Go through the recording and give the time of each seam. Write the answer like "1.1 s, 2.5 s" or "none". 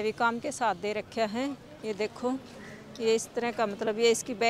none